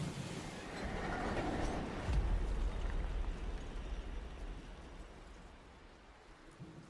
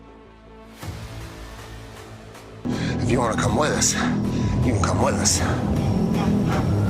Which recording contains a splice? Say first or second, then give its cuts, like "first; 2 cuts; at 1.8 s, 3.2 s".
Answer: second; 1 cut; at 2.3 s